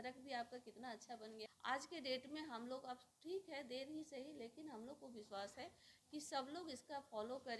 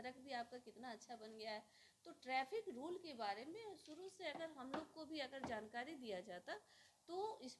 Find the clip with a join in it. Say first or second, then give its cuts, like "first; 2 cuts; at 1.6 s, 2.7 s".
first; 1 cut; at 1.4 s